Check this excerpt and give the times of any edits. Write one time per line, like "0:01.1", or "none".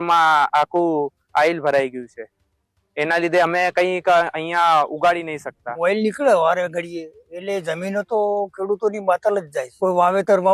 0:05.8
0:09.6